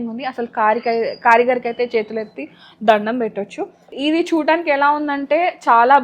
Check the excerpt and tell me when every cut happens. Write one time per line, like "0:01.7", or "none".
0:03.9